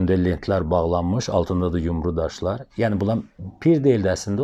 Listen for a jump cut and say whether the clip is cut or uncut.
uncut